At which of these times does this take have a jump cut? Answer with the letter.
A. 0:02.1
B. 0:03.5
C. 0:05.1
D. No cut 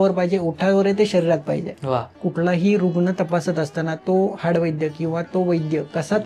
A